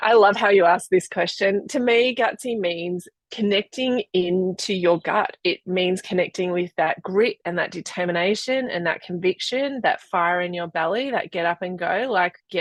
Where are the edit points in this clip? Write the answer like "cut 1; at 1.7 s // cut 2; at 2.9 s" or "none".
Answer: none